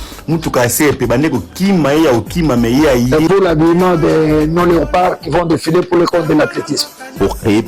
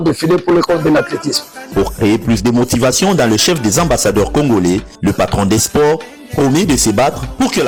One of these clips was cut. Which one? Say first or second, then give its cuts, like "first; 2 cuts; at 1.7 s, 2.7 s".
first; 1 cut; at 3.2 s